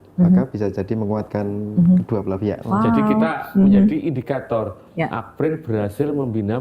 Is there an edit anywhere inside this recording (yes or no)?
yes